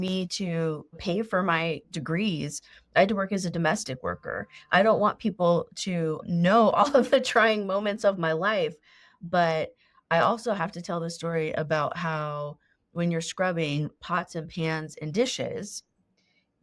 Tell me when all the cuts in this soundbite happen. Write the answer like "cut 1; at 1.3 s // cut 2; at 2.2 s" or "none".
cut 1; at 1.0 s // cut 2; at 1.9 s // cut 3; at 6.2 s